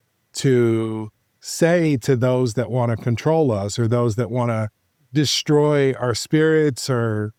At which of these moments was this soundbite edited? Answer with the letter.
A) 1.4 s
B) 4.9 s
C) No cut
C